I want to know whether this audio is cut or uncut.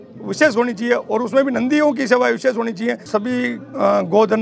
cut